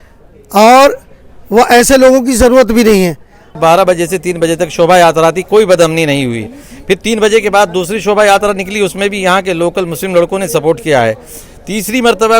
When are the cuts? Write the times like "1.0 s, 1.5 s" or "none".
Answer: 3.5 s